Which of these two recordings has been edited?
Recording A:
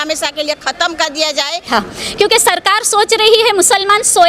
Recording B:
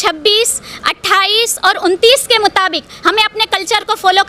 A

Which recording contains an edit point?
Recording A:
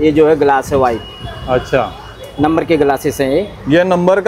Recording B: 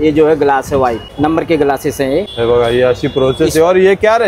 B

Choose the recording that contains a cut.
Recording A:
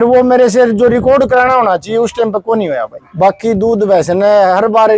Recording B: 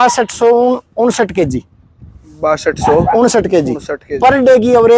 A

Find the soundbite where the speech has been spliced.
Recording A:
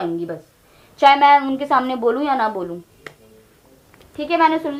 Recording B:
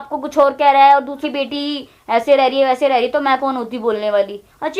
B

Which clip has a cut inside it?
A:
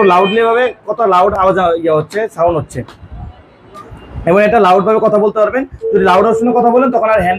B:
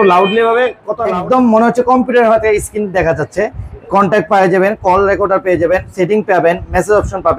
B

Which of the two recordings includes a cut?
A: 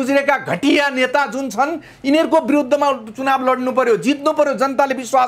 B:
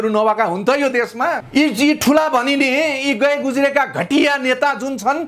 B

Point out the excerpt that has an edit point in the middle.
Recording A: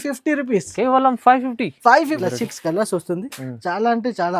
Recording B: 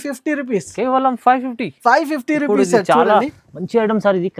A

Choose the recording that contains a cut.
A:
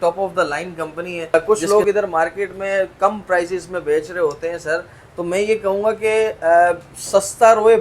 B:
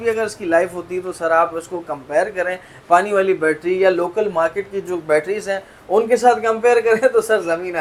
A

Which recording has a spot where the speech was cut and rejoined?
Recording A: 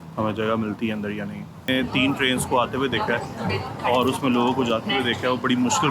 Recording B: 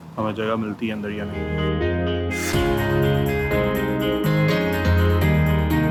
A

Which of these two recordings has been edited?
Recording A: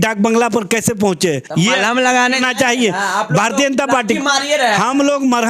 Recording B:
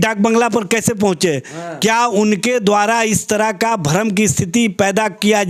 A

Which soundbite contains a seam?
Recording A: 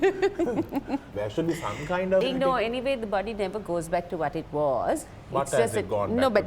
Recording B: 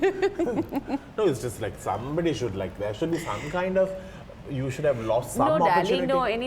A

